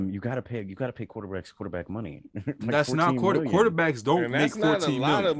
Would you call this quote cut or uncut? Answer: uncut